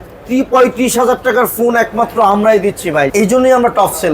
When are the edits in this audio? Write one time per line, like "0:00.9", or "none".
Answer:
0:03.1

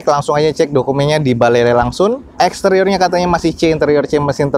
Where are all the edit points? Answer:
none

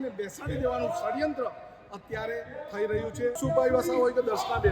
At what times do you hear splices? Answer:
0:03.4

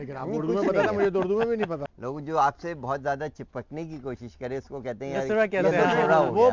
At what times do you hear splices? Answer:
0:01.9

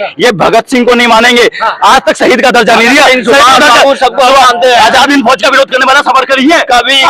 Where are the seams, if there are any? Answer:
none

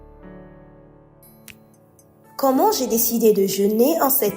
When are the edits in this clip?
0:01.1

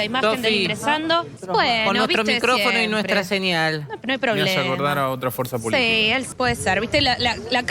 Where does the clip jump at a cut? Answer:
0:01.4
0:06.3

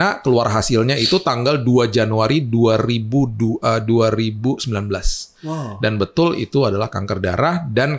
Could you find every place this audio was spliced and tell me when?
none

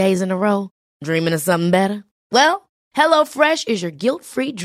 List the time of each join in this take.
none

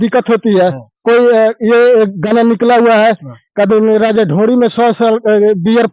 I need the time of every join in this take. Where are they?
none

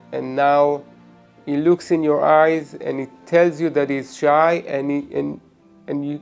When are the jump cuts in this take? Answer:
none

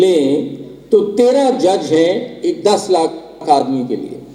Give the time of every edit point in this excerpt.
none

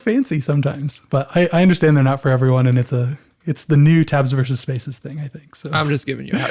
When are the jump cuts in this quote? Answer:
0:00.9

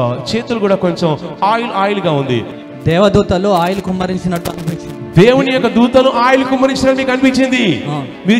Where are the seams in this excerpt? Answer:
0:02.5

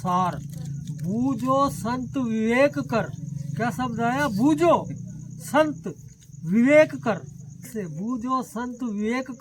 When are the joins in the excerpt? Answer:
0:07.7

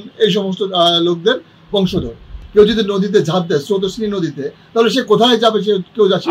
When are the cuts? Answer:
0:02.4

